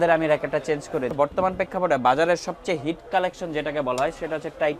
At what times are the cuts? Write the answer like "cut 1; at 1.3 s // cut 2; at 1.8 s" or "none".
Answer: cut 1; at 1.1 s